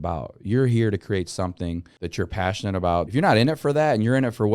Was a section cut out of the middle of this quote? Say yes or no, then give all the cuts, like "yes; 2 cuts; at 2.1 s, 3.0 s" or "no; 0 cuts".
yes; 2 cuts; at 2.0 s, 3.1 s